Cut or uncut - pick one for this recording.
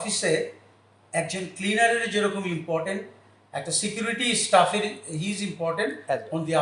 uncut